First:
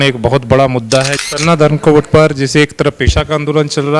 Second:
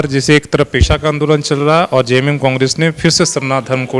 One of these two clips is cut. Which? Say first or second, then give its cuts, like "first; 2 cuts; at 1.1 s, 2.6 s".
first; 1 cut; at 1.2 s